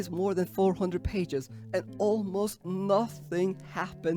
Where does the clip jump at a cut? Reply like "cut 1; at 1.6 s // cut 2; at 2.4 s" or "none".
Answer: none